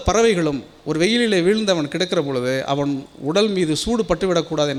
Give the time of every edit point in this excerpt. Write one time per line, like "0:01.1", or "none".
none